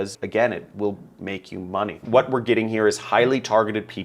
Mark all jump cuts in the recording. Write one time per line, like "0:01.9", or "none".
0:02.0